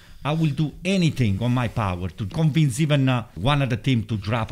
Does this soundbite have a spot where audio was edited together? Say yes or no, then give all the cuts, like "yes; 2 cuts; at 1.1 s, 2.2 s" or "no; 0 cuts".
yes; 2 cuts; at 2.3 s, 3.3 s